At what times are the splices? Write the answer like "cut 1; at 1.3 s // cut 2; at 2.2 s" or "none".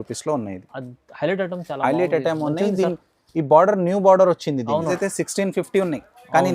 cut 1; at 4.9 s